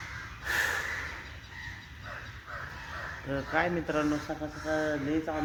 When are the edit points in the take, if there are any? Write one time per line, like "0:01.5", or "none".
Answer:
none